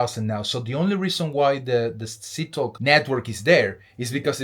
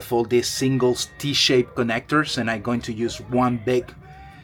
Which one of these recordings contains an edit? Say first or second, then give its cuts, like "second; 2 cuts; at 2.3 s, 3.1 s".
first; 1 cut; at 2.8 s